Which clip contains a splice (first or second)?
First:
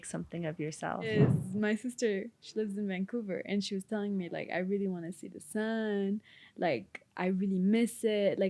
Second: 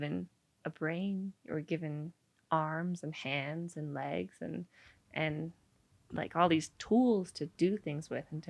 first